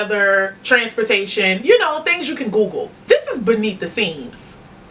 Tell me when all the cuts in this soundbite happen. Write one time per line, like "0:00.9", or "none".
0:02.9